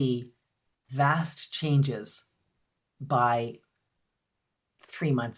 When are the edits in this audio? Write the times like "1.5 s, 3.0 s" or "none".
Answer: none